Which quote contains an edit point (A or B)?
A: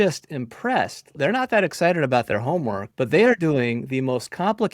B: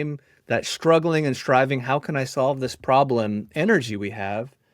A